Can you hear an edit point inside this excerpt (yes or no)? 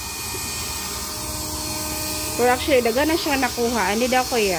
no